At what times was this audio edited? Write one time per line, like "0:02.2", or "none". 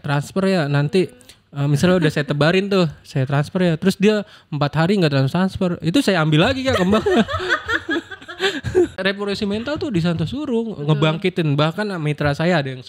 0:09.0

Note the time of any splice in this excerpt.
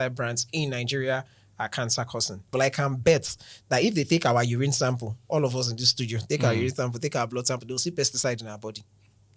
0:02.5

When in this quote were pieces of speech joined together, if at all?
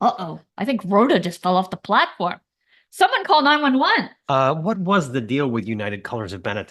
0:04.2

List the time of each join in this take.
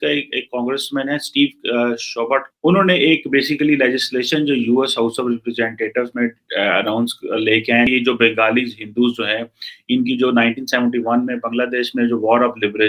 0:02.5
0:07.9

